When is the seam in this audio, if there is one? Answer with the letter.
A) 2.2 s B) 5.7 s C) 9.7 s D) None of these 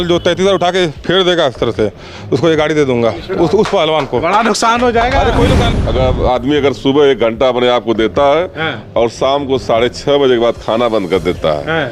B